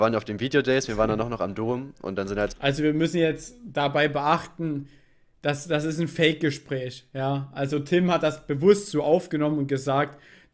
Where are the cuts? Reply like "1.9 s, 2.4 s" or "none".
none